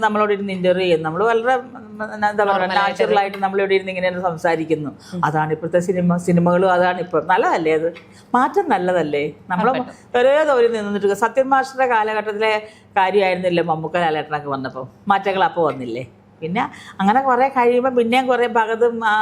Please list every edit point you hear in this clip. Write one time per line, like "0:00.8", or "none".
none